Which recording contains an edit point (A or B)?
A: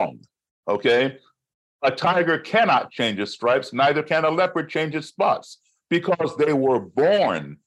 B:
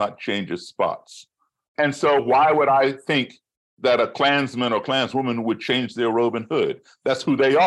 B